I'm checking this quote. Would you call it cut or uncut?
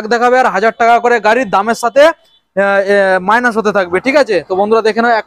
uncut